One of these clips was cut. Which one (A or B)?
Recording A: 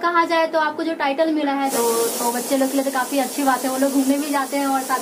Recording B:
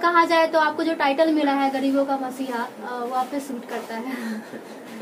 A